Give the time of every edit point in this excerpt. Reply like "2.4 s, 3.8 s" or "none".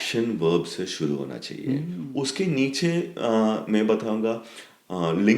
2.0 s